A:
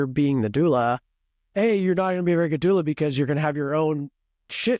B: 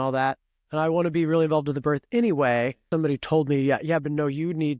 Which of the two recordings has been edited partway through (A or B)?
B